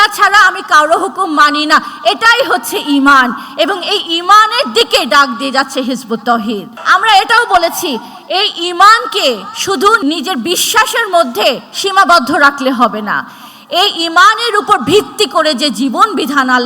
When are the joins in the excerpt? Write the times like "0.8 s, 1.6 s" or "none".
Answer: 6.7 s